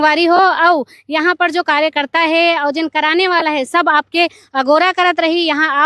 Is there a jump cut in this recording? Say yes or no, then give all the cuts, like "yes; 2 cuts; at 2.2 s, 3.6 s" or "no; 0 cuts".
no; 0 cuts